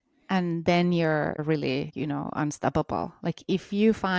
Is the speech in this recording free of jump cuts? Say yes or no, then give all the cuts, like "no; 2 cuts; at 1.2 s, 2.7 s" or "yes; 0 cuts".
no; 1 cut; at 1.6 s